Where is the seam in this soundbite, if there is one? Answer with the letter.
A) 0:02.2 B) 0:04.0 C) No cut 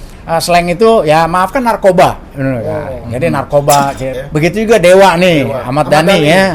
B